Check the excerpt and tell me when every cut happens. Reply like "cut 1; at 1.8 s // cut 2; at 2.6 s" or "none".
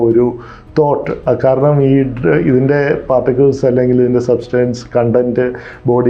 none